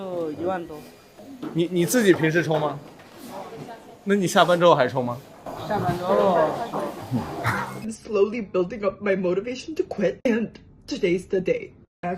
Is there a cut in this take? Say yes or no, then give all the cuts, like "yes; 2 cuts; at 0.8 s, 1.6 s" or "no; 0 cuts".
yes; 1 cut; at 7.9 s